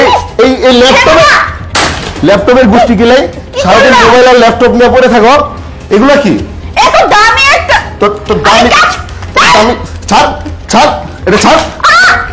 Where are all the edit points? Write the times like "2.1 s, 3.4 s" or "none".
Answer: none